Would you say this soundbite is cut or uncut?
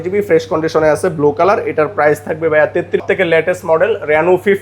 cut